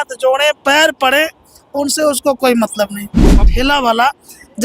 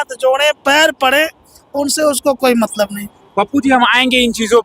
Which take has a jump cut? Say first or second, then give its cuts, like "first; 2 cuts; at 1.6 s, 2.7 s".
first; 1 cut; at 3.4 s